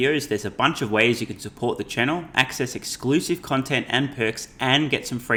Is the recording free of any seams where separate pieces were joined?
yes; 0 cuts

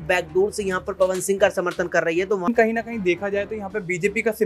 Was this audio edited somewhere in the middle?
yes; 1 cut; at 2.5 s

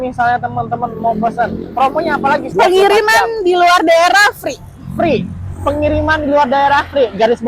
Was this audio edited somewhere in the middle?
yes; 1 cut; at 2.5 s

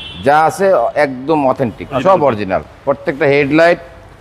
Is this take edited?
yes; 1 cut; at 2.0 s

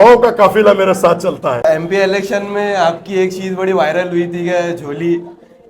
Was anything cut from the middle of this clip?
yes; 1 cut; at 1.6 s

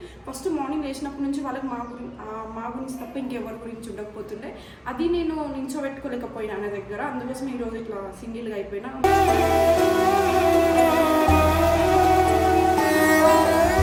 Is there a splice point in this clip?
no; 0 cuts

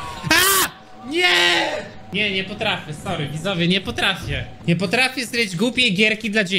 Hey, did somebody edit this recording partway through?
yes; 2 cuts; at 2.0 s, 4.5 s

